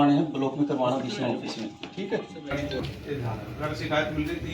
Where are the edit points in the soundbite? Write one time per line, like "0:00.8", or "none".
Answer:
0:02.7